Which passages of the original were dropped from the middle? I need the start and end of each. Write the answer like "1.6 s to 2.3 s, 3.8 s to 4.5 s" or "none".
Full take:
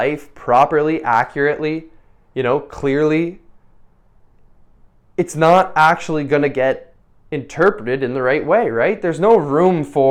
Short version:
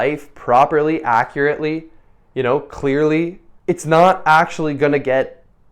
3.5 s to 5.0 s